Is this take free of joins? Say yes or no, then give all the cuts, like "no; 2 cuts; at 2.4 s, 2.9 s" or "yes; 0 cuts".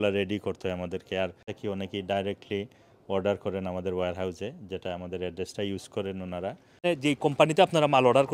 no; 2 cuts; at 1.5 s, 6.8 s